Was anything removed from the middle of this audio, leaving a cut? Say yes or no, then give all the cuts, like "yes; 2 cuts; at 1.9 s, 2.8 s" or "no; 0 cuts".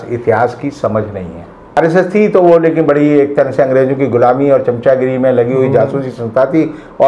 yes; 1 cut; at 1.8 s